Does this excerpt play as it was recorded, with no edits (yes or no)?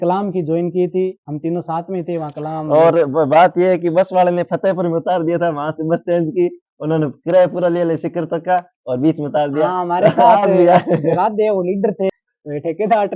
no